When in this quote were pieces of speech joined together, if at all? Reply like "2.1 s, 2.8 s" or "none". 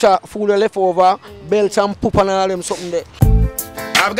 3.1 s